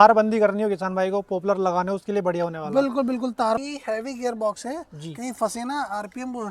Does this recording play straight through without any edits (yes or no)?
no